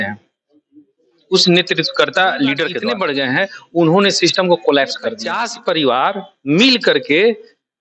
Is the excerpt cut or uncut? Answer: cut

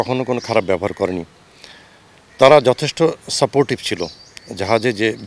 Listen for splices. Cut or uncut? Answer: uncut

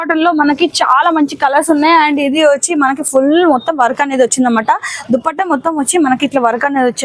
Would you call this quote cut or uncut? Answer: uncut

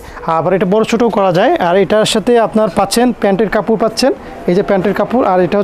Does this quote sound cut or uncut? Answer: uncut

